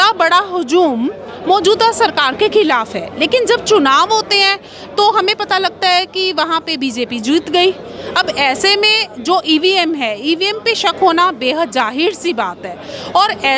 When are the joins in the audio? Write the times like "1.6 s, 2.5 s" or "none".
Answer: none